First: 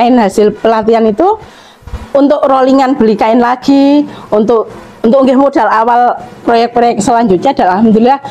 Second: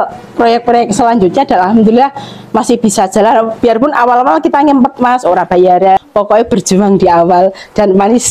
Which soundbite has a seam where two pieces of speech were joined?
second; 1 cut; at 6.0 s

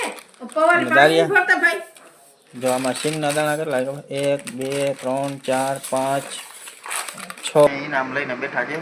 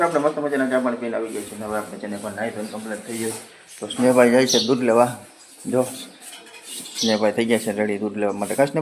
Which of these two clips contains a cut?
first; 1 cut; at 7.7 s

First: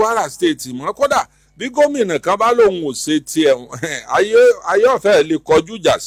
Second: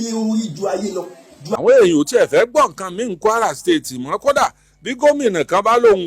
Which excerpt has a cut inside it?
second; 1 cut; at 1.6 s

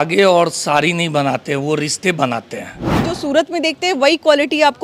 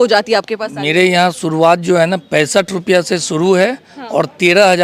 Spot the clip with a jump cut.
first; 1 cut; at 3.0 s

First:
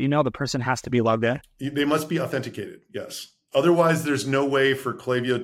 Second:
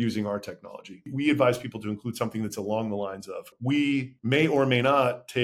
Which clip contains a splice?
second; 3 cuts; at 1.0 s, 3.5 s, 4.1 s

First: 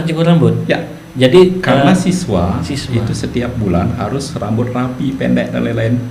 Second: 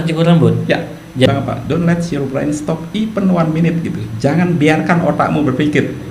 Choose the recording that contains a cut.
second; 1 cut; at 1.3 s

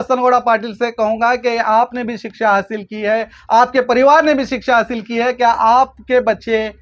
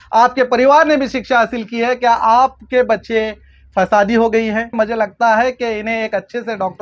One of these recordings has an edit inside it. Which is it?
second; 1 cut; at 4.7 s

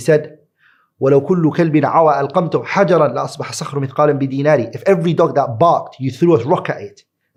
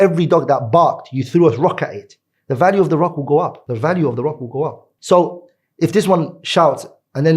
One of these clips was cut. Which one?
second; 2 cuts; at 3.6 s, 4.9 s

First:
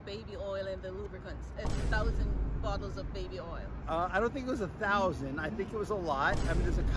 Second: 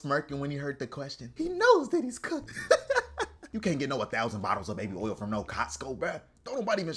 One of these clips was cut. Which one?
second; 2 cuts; at 2.5 s, 3.4 s

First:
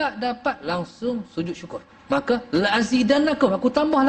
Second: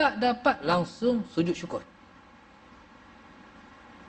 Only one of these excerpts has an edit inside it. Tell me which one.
first; 1 cut; at 1.9 s

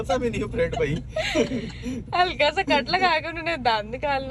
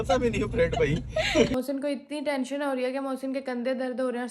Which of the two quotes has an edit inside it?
second; 1 cut; at 1.5 s

